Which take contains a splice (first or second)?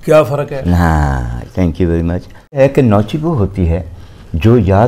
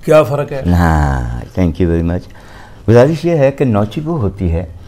first